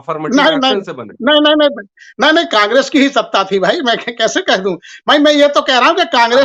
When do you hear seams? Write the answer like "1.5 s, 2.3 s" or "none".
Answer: none